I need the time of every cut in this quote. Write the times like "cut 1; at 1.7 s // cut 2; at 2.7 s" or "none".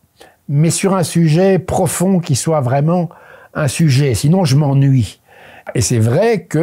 cut 1; at 5.7 s